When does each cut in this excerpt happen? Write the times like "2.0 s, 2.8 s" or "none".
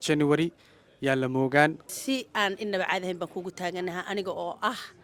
1.8 s